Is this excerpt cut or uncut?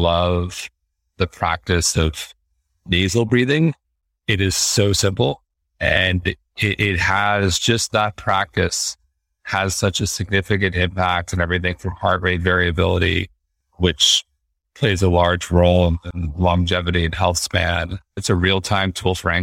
cut